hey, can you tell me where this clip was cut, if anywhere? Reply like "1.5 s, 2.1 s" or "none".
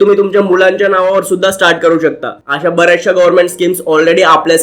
2.3 s